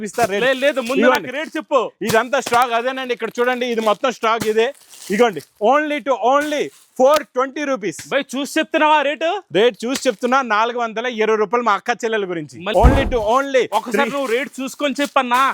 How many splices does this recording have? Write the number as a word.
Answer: one